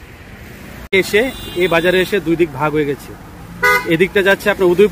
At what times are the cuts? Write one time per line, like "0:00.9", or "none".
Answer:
0:01.2